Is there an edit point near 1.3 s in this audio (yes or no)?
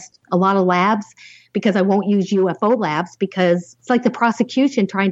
no